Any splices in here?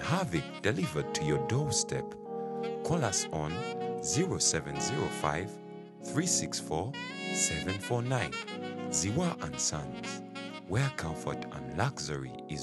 no; 0 cuts

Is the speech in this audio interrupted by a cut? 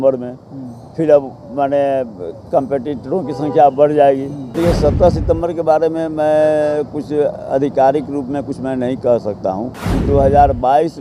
yes; 2 cuts; at 4.5 s, 9.7 s

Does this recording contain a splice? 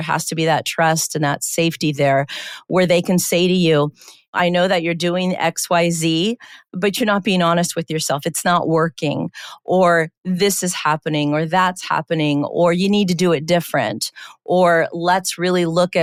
no; 0 cuts

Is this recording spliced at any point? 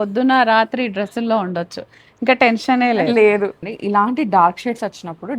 yes; 1 cut; at 3.6 s

